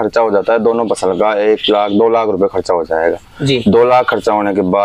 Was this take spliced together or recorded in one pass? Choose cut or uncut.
uncut